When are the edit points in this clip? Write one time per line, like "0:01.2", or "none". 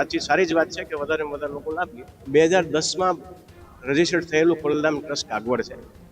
0:02.2